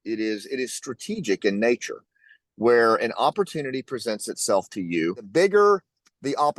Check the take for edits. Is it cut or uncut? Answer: cut